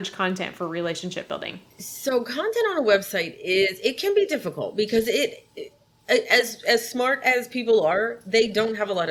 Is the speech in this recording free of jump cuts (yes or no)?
yes